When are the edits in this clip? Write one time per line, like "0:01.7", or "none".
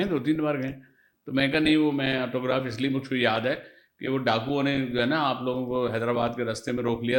none